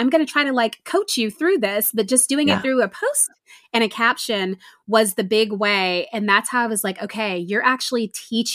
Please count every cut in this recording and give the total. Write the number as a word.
zero